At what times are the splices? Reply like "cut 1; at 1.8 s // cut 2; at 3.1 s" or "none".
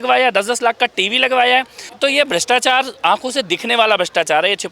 cut 1; at 1.8 s